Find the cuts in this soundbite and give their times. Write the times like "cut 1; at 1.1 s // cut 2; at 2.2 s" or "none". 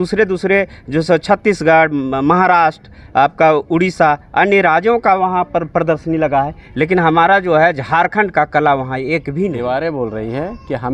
cut 1; at 9.5 s